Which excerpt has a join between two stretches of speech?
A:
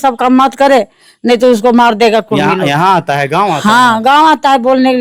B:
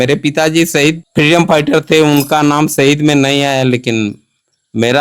B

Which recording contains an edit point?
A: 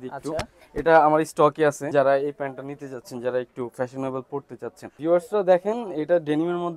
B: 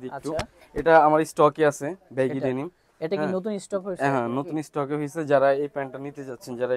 A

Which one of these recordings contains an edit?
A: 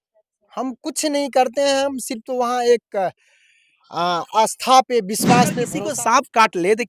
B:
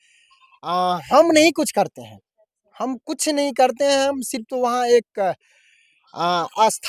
A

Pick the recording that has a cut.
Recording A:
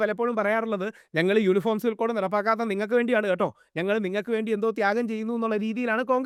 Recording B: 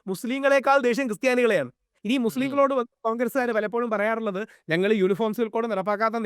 B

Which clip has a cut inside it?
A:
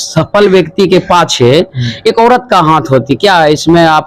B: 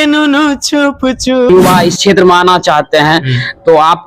B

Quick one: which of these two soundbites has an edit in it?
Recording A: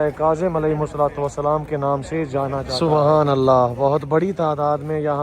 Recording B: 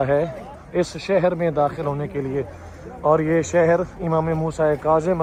A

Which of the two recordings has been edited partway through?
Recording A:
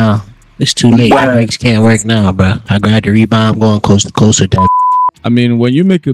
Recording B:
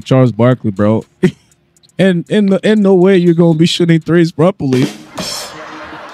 A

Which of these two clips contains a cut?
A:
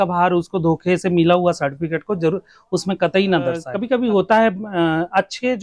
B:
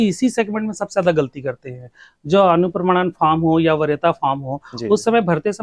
A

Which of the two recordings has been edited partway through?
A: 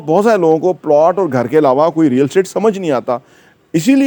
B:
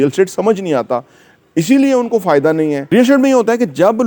B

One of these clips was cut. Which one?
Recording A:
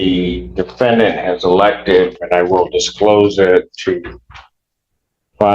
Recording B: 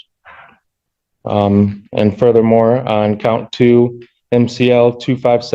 A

